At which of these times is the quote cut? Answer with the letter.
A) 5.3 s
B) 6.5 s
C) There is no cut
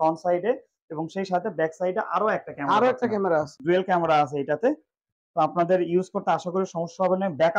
C